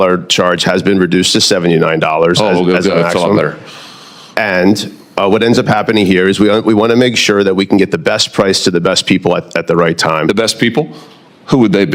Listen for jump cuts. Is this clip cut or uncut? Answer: uncut